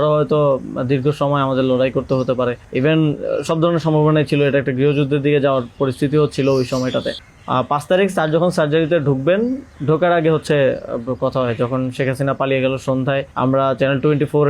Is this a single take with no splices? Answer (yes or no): yes